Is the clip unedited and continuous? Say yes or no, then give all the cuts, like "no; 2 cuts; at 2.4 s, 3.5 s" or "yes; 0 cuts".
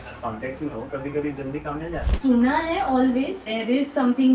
no; 3 cuts; at 0.9 s, 2.1 s, 3.4 s